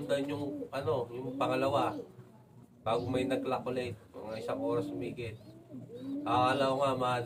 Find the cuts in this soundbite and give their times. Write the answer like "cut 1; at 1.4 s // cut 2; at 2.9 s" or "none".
none

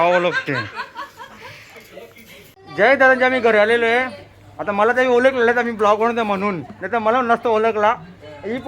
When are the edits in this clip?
cut 1; at 2.6 s

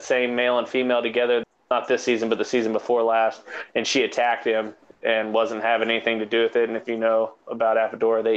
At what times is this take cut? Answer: cut 1; at 1.4 s // cut 2; at 4.8 s

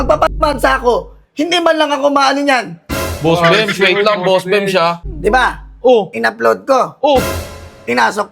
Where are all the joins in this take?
cut 1; at 5.1 s

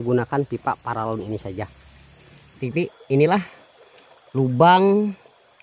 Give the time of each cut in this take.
cut 1; at 2.6 s

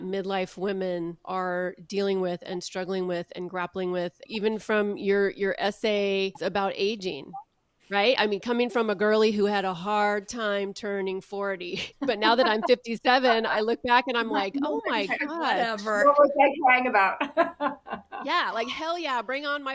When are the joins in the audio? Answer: cut 1; at 1.2 s // cut 2; at 4.2 s // cut 3; at 6.4 s // cut 4; at 11.9 s

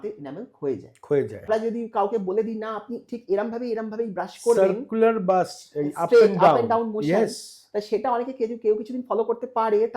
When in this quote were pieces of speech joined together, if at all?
cut 1; at 1.5 s

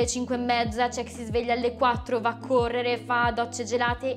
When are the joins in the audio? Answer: none

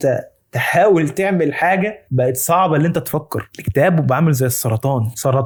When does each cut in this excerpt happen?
none

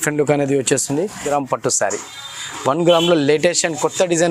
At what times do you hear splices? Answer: cut 1; at 1.3 s

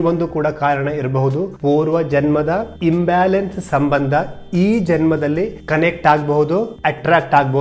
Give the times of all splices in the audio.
cut 1; at 1.5 s // cut 2; at 2.7 s // cut 3; at 5.6 s // cut 4; at 6.7 s

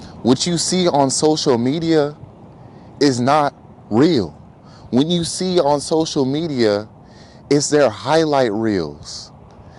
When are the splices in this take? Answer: none

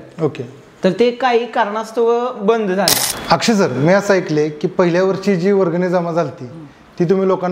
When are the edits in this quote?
cut 1; at 3.1 s

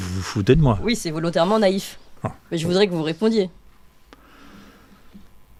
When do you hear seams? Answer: none

